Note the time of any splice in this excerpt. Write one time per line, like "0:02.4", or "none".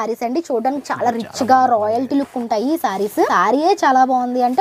0:03.3